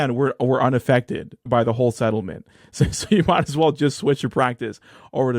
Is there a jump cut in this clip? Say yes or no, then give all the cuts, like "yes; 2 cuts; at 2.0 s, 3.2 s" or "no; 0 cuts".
yes; 1 cut; at 1.5 s